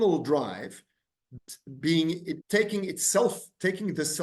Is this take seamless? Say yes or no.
no